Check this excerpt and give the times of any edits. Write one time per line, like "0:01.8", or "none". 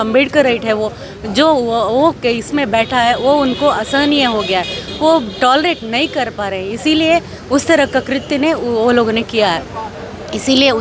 none